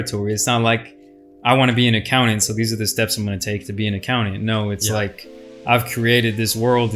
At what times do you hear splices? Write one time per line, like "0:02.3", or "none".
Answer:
none